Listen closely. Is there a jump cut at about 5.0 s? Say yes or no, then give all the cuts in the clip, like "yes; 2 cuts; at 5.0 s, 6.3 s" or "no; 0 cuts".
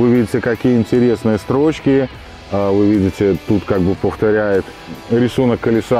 yes; 1 cut; at 5.0 s